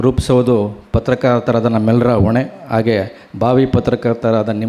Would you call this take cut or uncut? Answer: uncut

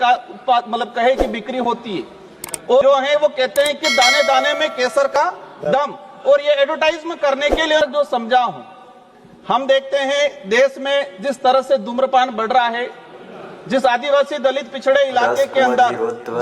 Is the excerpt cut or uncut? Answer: cut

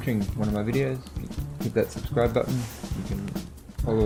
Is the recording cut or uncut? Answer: uncut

